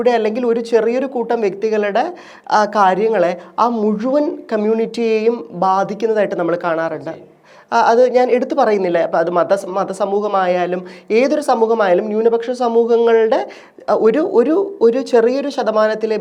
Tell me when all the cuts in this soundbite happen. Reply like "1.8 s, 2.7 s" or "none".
none